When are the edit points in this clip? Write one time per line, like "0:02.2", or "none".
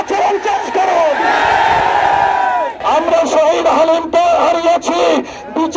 0:02.7